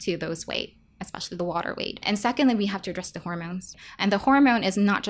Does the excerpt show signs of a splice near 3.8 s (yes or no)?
yes